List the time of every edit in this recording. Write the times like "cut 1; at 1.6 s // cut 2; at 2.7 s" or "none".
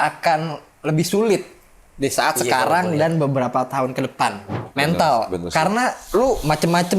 cut 1; at 4.7 s